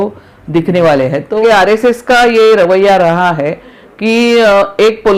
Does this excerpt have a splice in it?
yes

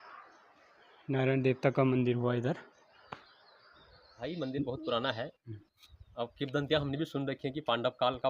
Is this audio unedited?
no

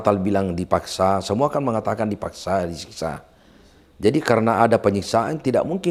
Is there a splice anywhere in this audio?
no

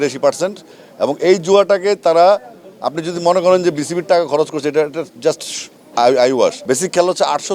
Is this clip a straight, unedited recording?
no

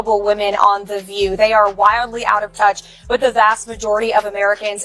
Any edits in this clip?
no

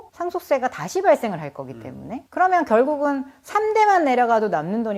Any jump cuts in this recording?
no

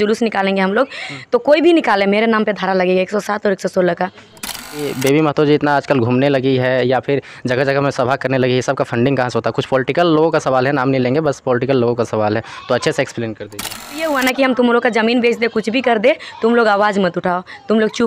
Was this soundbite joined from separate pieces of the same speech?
yes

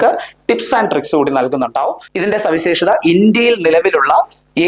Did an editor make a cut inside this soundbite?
yes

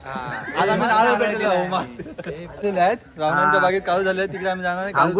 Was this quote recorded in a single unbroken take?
no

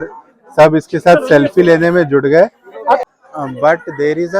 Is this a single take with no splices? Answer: no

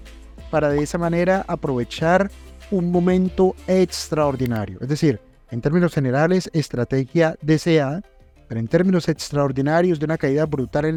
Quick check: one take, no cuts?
yes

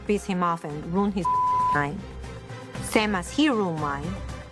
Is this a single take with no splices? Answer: yes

